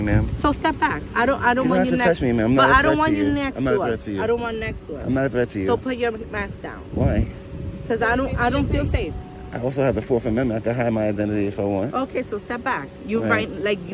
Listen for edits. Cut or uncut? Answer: uncut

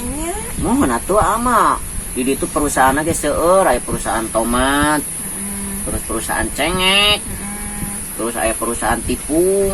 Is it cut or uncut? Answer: uncut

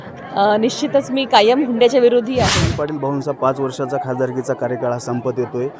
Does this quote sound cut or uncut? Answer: cut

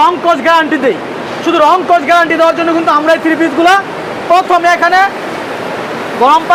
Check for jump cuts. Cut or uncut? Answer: uncut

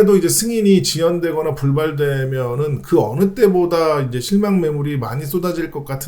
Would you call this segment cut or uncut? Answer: uncut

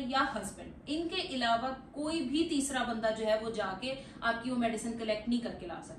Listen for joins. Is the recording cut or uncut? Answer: uncut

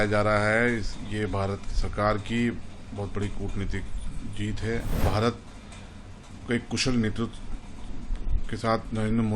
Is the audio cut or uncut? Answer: cut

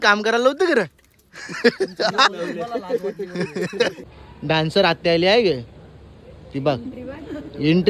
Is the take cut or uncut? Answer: cut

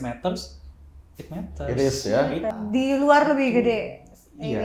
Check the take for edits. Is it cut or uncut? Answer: cut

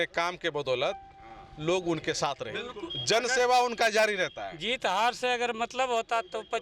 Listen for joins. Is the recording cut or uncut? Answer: cut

